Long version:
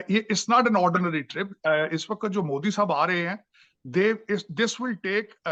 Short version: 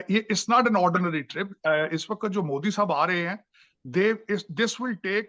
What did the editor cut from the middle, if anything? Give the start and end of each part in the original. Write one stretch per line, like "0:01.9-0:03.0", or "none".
none